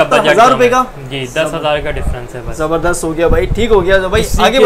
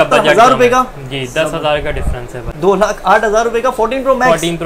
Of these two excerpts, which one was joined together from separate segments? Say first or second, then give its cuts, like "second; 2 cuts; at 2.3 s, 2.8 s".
second; 1 cut; at 2.4 s